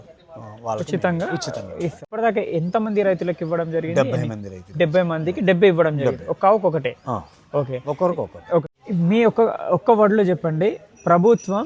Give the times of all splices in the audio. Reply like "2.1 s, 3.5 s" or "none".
2.1 s, 8.6 s